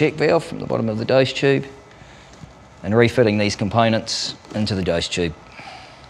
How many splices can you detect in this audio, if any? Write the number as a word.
one